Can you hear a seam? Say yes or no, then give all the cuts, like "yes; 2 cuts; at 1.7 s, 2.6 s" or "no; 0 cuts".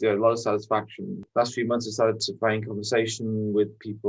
yes; 1 cut; at 1.2 s